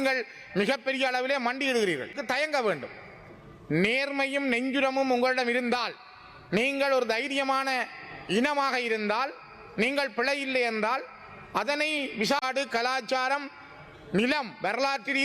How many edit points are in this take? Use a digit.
2